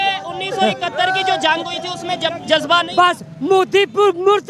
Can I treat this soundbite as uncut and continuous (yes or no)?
yes